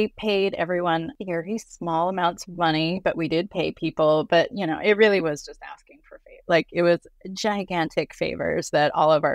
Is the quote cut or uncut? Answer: uncut